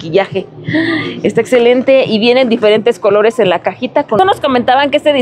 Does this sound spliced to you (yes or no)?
yes